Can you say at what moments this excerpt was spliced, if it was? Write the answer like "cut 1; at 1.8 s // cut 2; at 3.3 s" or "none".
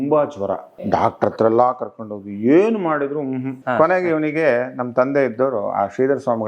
cut 1; at 0.9 s // cut 2; at 3.6 s